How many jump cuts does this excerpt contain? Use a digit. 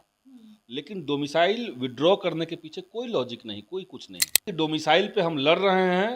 1